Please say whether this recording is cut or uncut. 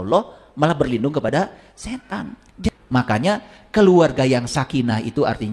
cut